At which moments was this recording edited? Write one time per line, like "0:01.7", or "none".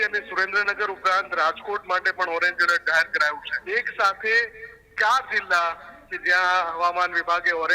0:03.5